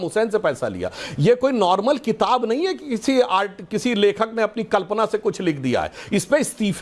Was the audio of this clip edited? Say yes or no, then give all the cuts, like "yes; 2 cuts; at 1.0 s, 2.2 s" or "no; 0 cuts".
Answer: no; 0 cuts